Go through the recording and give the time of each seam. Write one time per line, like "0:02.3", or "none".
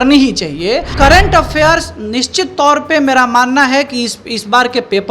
0:00.9